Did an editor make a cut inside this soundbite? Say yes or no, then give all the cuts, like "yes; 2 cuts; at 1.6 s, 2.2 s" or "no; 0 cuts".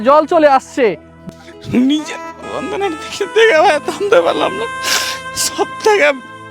yes; 1 cut; at 1.1 s